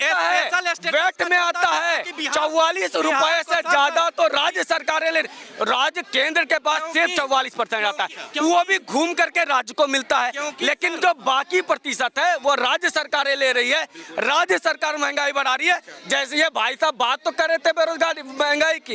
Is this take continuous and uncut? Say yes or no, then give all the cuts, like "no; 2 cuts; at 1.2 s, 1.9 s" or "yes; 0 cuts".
yes; 0 cuts